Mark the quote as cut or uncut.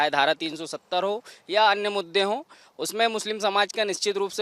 uncut